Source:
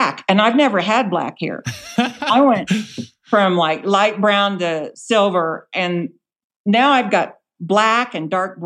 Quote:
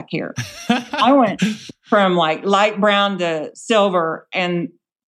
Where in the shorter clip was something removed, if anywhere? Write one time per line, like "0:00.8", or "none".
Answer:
0:01.7